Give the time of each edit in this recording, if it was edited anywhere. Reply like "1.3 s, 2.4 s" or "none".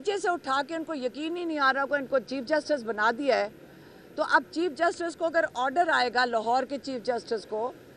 none